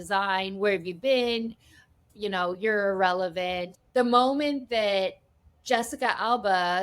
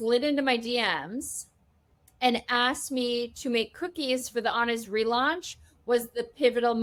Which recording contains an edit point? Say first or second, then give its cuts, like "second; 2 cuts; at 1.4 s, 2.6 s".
first; 2 cuts; at 2.0 s, 3.7 s